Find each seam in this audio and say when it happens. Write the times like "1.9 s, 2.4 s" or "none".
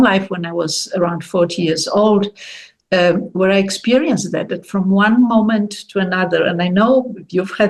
none